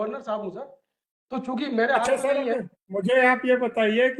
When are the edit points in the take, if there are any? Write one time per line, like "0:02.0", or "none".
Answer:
none